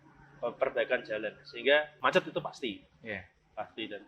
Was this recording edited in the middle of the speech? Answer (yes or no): yes